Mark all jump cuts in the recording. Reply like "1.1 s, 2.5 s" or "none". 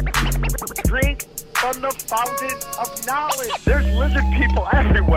1.3 s

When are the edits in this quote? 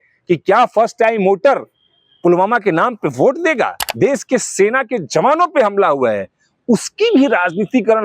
3.8 s

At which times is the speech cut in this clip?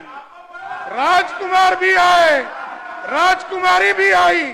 none

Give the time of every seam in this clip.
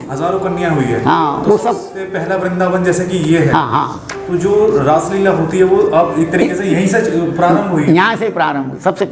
none

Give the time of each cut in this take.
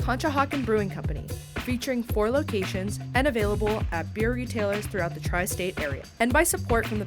6.0 s

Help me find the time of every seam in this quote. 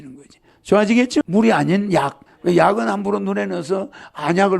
1.2 s, 2.2 s

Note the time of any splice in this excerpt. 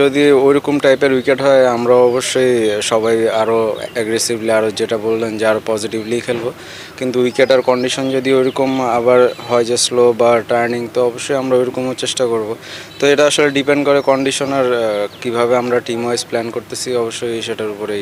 none

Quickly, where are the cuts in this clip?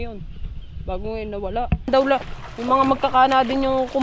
1.9 s

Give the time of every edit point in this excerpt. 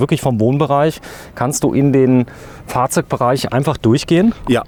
none

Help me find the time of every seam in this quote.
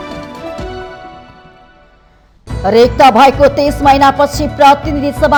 none

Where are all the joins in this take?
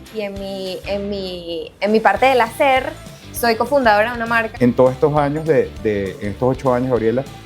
4.5 s

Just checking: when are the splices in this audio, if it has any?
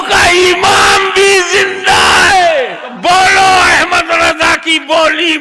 2.9 s

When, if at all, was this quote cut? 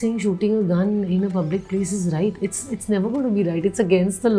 none

